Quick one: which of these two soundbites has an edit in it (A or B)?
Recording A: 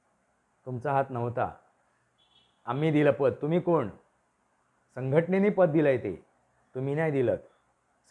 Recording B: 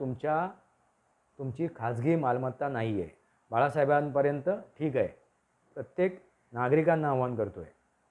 B